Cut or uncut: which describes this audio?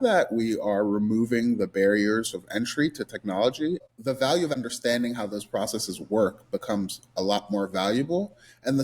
cut